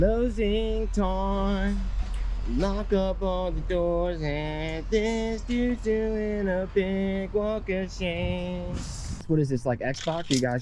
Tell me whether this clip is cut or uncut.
cut